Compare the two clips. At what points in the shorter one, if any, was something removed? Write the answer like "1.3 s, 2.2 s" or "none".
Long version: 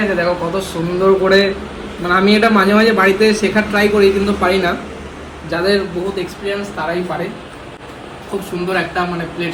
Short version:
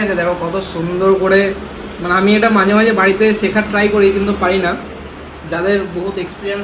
none

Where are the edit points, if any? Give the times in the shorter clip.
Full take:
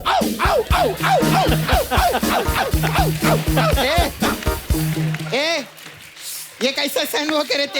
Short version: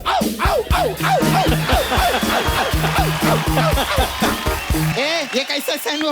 4.9 s

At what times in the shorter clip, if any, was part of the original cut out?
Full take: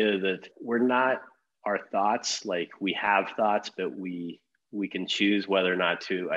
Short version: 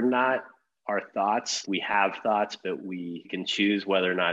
1.6 s, 3.3 s

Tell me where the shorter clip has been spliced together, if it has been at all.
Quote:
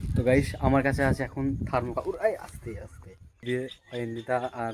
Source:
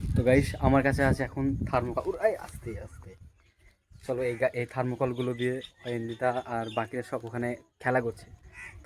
3.4 s

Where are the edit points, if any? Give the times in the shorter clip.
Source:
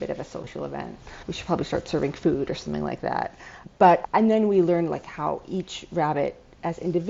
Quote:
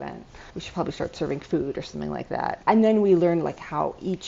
2.6 s

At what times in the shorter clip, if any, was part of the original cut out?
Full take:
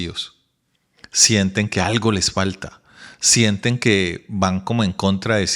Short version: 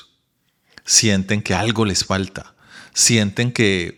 none

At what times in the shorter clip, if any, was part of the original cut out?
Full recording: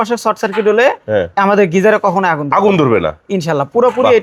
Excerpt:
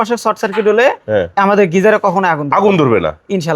none

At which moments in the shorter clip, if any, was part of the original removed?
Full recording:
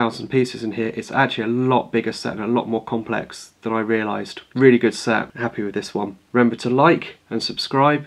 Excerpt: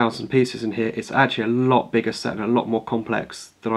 none

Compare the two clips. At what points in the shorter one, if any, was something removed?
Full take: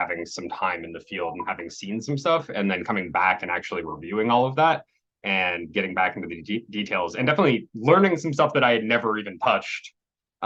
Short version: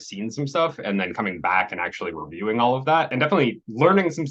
3.1 s

